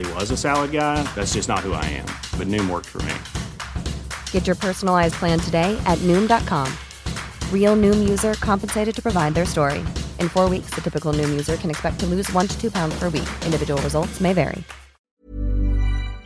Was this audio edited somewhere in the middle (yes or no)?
yes